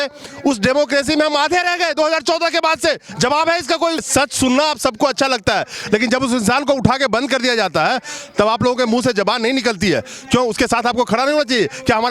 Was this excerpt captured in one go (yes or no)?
no